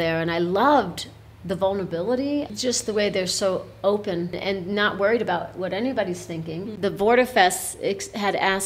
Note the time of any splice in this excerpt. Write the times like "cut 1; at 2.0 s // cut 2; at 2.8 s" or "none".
cut 1; at 2.5 s // cut 2; at 4.4 s // cut 3; at 6.6 s

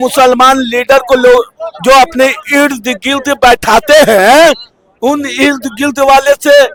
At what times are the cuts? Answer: none

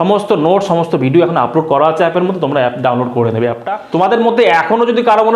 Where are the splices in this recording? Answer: cut 1; at 3.6 s

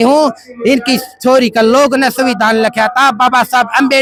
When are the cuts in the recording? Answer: none

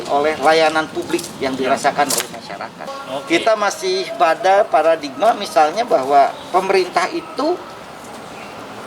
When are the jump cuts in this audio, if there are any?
cut 1; at 2.9 s

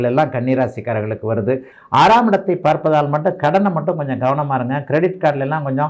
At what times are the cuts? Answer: cut 1; at 1.7 s

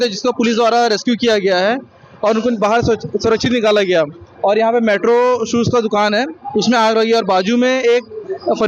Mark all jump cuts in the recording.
none

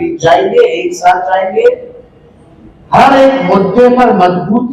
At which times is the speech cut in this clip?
none

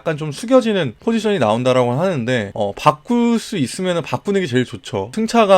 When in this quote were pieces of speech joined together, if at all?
cut 1; at 0.9 s // cut 2; at 2.5 s

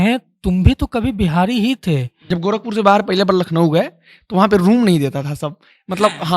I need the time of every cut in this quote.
cut 1; at 2.1 s

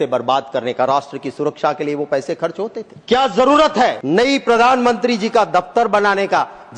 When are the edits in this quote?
cut 1; at 2.9 s // cut 2; at 4.0 s

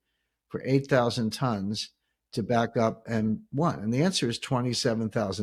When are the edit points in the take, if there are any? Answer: none

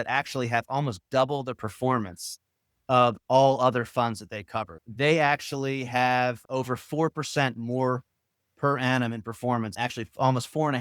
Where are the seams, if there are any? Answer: cut 1; at 4.8 s // cut 2; at 6.4 s // cut 3; at 9.7 s

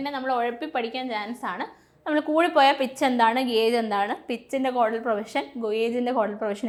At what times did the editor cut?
none

